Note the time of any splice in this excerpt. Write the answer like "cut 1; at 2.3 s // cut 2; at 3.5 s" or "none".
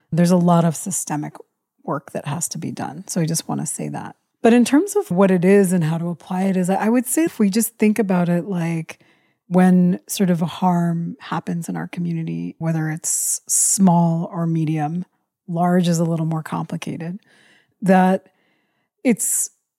cut 1; at 5.1 s // cut 2; at 7.3 s